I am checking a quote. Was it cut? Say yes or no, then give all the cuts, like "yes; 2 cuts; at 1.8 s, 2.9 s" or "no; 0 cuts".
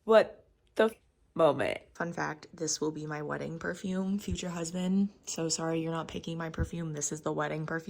yes; 2 cuts; at 0.9 s, 1.9 s